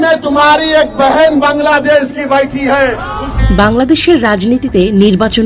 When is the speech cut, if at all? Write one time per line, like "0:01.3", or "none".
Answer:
0:03.3